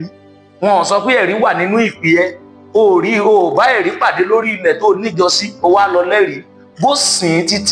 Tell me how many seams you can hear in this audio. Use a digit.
0